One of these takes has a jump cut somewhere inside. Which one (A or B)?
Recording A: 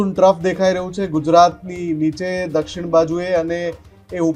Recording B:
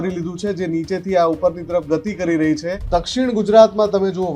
B